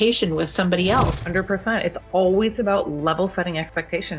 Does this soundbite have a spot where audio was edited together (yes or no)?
yes